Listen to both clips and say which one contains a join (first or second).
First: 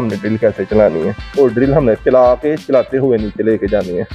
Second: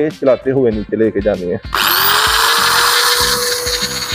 first